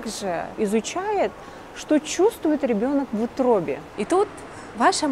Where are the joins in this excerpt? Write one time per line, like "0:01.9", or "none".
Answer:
0:03.9

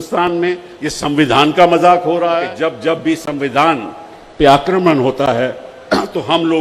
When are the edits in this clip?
0:02.5

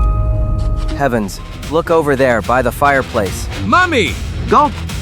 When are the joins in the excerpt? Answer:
0:01.0

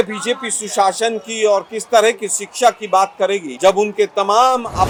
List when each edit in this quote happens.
none

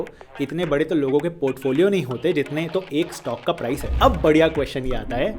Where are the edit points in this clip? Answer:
0:03.9

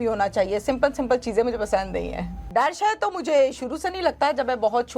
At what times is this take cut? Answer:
0:02.4

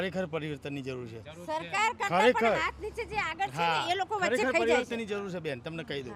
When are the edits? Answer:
none

